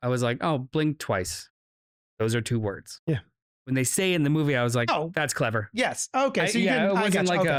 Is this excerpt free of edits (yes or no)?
yes